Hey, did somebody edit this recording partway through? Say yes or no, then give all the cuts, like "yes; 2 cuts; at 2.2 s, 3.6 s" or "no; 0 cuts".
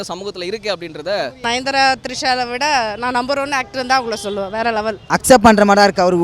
yes; 2 cuts; at 1.4 s, 5.0 s